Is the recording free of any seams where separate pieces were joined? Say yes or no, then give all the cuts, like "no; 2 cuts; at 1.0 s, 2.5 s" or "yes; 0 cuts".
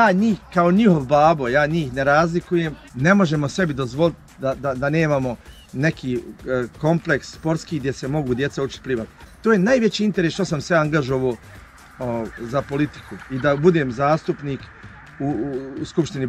no; 1 cut; at 2.8 s